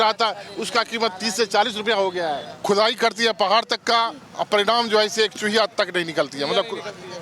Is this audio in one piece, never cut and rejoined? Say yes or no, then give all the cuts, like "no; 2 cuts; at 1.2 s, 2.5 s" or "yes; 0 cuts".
no; 1 cut; at 2.5 s